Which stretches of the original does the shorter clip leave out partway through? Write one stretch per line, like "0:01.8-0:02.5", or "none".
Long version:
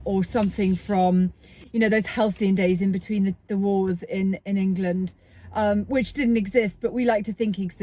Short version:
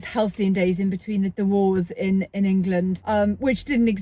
0:03.3-0:03.4
0:05.1-0:05.5